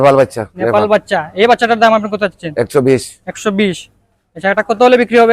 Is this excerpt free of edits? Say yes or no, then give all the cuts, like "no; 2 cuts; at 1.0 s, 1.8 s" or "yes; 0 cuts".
yes; 0 cuts